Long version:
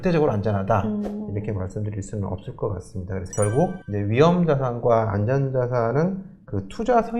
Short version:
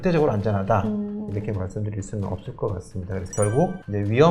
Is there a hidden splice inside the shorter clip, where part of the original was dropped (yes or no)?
no